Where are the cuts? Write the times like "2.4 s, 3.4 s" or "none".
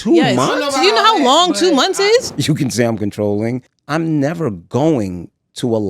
2.3 s, 3.7 s